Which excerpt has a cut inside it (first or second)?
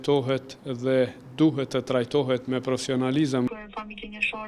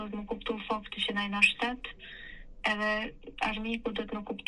first